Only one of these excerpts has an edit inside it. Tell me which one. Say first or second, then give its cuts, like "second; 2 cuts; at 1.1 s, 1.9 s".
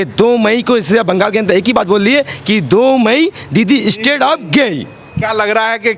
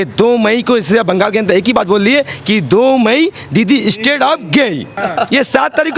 second; 1 cut; at 4.9 s